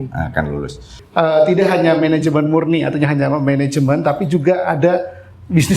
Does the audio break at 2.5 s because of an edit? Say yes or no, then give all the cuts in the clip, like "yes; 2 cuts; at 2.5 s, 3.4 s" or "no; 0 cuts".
no; 1 cut; at 0.9 s